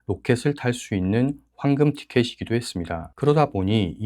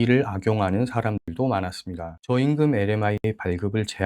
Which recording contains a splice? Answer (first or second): second